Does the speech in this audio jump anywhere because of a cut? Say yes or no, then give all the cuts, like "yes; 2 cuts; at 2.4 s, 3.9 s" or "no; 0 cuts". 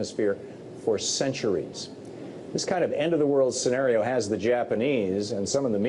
no; 0 cuts